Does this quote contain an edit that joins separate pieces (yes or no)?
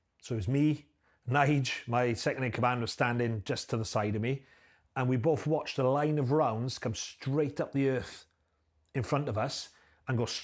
no